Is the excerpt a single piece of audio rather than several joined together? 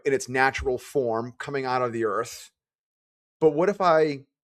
yes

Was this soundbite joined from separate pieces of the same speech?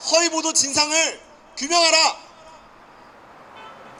no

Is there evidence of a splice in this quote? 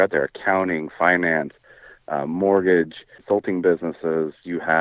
yes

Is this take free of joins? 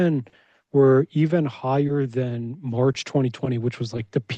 yes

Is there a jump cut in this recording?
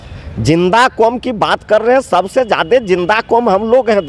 no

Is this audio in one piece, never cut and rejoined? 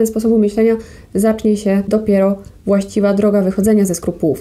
no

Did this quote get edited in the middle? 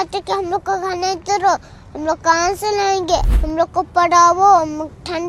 yes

